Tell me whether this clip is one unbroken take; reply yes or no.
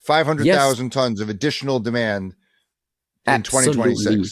yes